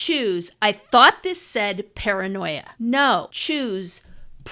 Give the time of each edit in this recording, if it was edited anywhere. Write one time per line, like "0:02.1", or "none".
0:02.7
0:03.3